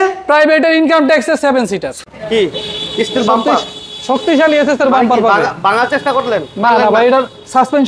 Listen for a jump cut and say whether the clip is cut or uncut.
cut